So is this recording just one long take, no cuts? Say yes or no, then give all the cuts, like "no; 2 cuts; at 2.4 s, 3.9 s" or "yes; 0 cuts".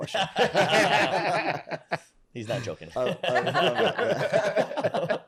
yes; 0 cuts